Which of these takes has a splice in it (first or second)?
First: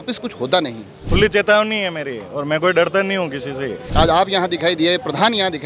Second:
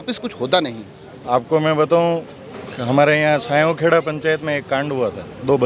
first